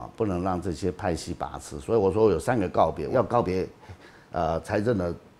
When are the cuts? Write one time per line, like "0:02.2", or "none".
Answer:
0:03.1